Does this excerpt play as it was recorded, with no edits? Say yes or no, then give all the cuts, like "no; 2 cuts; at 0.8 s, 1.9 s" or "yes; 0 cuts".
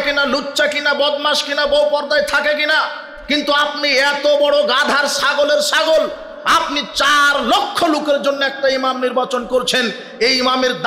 yes; 0 cuts